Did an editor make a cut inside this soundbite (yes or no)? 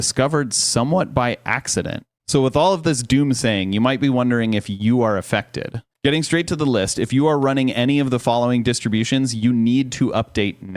yes